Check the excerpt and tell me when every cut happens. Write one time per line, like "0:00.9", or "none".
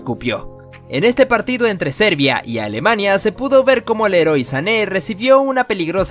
none

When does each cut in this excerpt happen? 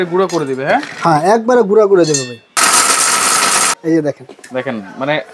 0:02.6
0:03.7

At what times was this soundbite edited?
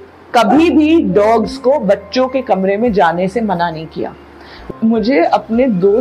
0:04.7

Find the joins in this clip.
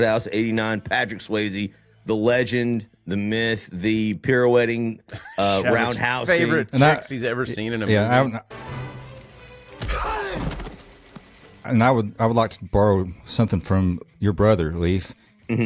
none

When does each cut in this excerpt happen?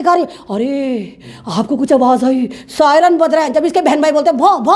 none

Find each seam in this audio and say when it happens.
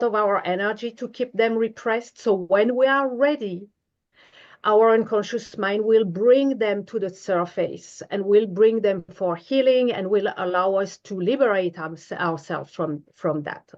none

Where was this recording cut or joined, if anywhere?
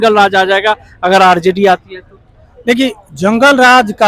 none

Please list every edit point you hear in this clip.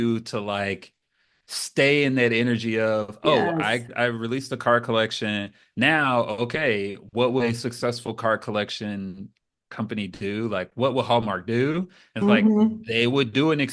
0:03.9

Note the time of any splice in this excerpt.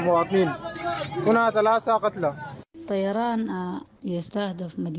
0:02.7
0:03.9

